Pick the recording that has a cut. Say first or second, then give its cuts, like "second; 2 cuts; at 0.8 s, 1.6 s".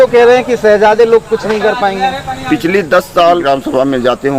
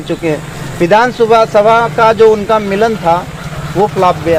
first; 1 cut; at 3.4 s